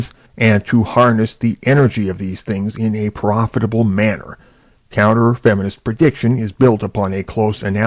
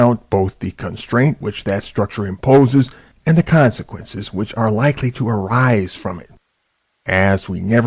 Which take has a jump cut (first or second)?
second